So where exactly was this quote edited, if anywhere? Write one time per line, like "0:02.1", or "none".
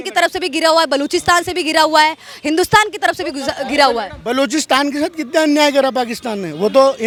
none